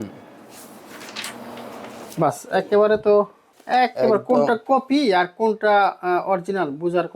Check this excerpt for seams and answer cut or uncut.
cut